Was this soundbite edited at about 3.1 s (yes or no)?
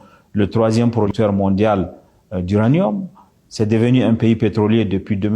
no